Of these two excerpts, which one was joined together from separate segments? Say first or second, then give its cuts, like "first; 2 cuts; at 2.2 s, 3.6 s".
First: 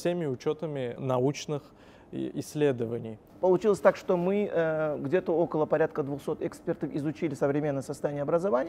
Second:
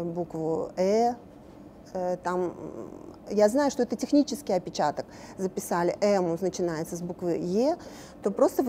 first; 2 cuts; at 1.0 s, 3.2 s